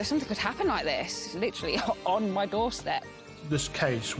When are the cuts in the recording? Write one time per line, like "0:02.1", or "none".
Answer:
0:01.3
0:03.4